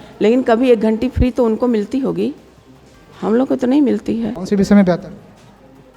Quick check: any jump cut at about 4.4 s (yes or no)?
yes